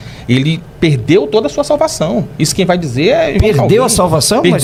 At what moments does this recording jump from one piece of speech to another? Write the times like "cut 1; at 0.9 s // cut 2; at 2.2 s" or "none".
none